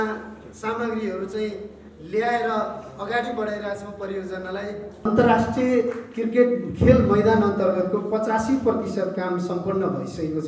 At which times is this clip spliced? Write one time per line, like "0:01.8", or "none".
0:05.0